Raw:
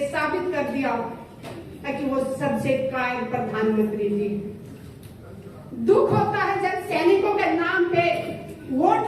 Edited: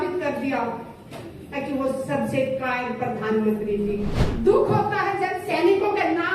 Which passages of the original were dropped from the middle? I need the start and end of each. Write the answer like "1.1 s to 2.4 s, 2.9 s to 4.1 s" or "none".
4.5 s to 5.6 s